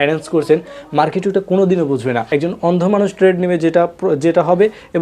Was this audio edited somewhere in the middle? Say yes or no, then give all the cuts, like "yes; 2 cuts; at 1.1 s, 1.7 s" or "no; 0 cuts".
yes; 1 cut; at 2.2 s